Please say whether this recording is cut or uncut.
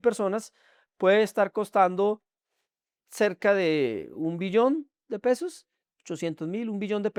uncut